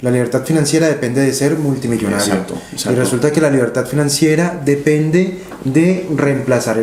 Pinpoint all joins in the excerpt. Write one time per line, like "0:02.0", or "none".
none